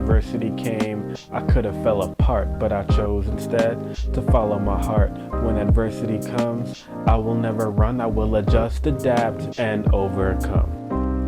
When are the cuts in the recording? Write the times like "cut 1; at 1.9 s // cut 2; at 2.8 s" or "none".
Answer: none